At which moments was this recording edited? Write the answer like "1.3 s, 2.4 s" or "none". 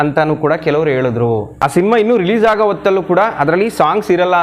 1.5 s